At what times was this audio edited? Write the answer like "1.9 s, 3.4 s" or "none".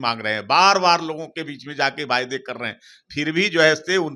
none